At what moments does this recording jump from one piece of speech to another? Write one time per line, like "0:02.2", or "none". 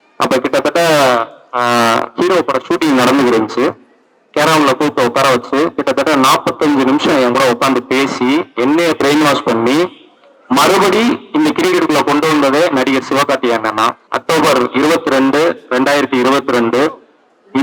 0:14.1